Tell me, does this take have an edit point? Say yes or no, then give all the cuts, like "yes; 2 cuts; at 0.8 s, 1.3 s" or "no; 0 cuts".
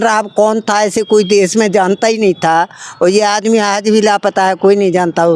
no; 0 cuts